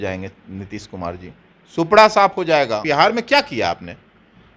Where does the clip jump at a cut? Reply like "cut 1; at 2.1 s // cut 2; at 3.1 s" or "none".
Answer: cut 1; at 2.8 s